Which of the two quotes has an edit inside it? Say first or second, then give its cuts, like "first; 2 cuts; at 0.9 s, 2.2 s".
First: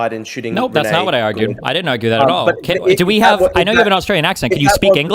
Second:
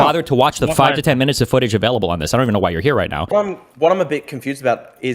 second; 1 cut; at 3.3 s